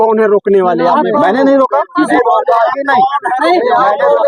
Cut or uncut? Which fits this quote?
cut